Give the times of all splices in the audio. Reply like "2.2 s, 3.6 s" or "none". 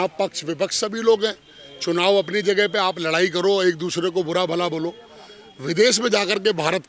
none